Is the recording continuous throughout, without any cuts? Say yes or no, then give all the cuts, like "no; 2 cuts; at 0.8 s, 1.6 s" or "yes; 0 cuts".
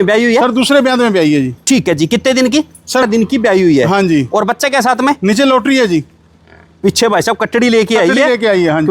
no; 1 cut; at 3.0 s